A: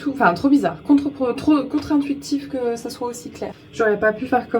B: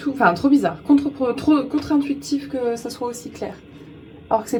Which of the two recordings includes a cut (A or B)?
A